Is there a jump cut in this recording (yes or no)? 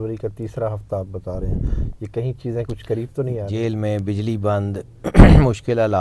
yes